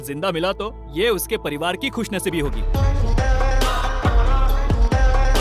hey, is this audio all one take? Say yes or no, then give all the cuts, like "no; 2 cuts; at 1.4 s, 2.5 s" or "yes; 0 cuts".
no; 1 cut; at 2.6 s